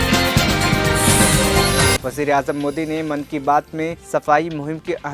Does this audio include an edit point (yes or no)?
yes